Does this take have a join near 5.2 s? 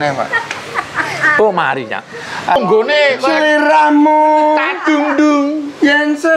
no; 1 cut; at 2.6 s

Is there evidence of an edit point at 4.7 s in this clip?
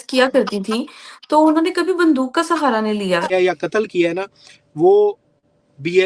no; 1 cut; at 3.3 s

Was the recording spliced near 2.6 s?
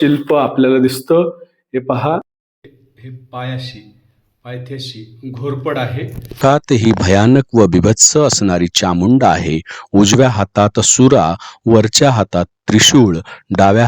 no; 1 cut; at 6.4 s

